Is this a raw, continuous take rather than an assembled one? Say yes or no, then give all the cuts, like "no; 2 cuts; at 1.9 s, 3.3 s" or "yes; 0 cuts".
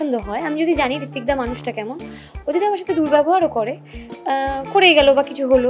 yes; 0 cuts